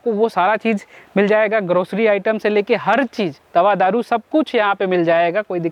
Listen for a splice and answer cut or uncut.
uncut